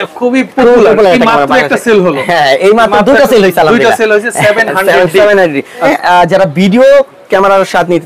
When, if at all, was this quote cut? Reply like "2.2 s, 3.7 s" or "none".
5.9 s